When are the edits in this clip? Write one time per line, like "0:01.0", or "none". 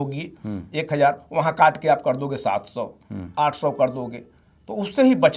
none